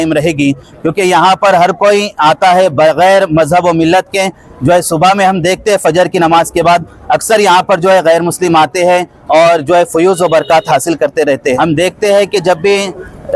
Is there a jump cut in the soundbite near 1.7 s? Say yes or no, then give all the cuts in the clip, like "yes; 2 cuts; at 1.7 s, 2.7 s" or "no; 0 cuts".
no; 1 cut; at 11.6 s